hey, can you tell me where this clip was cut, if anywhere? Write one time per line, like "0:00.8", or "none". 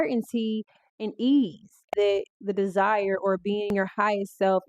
0:01.8
0:03.7